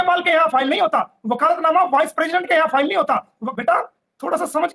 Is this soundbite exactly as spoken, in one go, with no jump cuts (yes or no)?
no